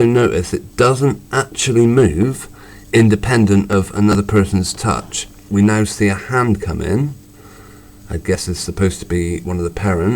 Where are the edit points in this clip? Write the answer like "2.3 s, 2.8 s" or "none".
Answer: 5.3 s